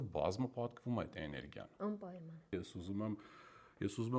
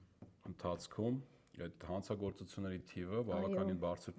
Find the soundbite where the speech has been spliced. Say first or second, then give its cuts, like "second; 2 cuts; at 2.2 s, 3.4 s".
first; 1 cut; at 2.5 s